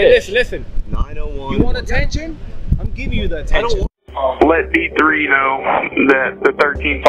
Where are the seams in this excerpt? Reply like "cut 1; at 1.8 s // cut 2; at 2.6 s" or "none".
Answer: cut 1; at 3.9 s